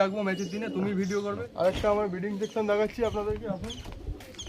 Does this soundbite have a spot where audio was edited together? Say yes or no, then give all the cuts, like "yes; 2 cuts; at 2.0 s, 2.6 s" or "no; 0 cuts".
yes; 1 cut; at 1.5 s